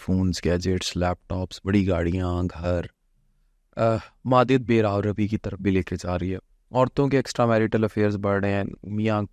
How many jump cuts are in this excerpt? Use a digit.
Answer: 0